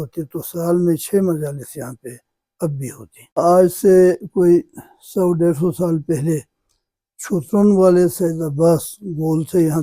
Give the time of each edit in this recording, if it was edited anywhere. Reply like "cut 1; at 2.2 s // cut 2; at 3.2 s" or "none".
cut 1; at 3.4 s